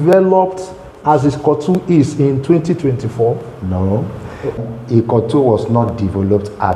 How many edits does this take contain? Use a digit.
1